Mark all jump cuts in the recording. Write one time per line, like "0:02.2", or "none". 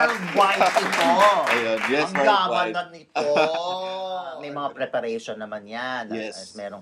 0:04.4